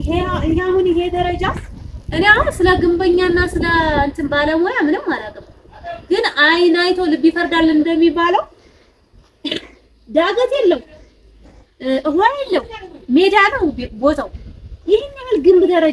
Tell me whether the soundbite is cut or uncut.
uncut